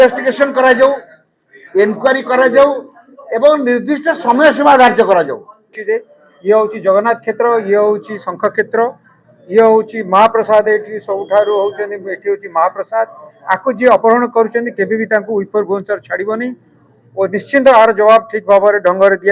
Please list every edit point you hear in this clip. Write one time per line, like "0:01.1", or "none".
0:05.8